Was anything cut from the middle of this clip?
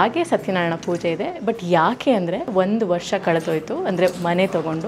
yes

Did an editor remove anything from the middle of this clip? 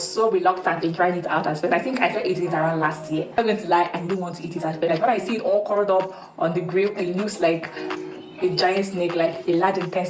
yes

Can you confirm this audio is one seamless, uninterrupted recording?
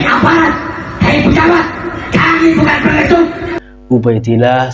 no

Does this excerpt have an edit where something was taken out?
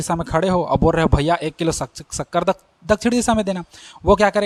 no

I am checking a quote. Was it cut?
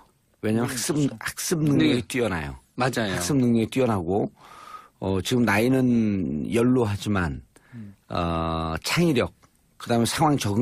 no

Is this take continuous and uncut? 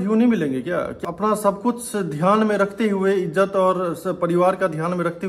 no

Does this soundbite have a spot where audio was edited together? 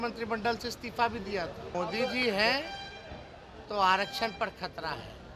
yes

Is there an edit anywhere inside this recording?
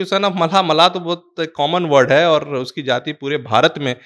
no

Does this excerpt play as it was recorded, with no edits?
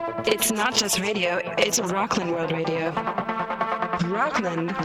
yes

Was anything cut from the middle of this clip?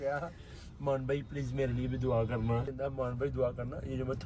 yes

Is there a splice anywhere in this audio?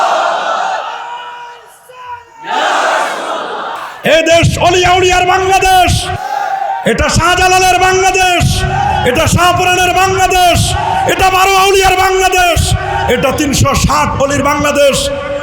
yes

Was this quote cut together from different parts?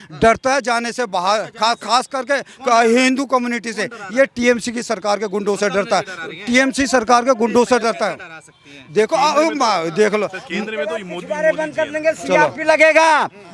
no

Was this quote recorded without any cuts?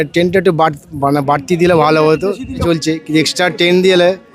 no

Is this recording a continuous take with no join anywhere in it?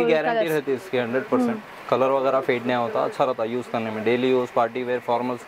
yes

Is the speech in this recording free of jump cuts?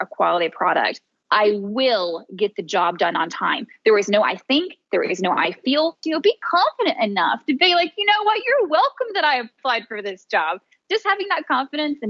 no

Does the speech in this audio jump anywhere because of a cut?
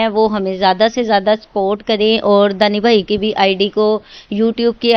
no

